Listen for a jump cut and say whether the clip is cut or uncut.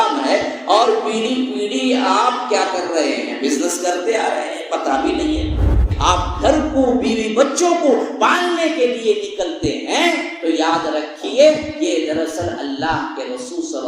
cut